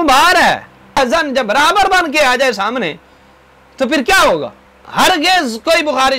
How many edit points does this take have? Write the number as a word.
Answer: two